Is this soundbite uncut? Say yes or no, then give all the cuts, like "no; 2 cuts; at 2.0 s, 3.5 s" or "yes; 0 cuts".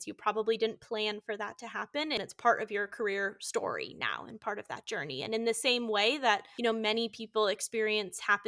no; 2 cuts; at 2.2 s, 6.5 s